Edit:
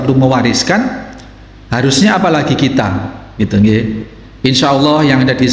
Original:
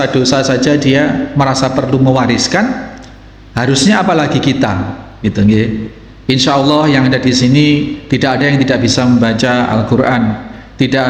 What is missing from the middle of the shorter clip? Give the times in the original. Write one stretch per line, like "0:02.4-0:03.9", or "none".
none